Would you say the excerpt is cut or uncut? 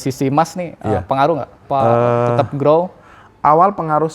cut